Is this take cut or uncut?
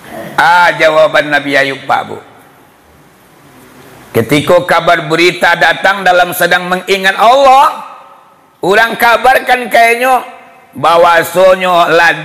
uncut